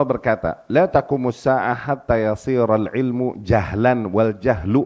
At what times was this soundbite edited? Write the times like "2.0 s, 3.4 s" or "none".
none